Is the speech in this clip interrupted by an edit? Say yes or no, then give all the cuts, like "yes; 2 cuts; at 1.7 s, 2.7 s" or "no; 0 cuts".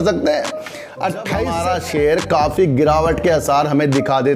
yes; 1 cut; at 1.5 s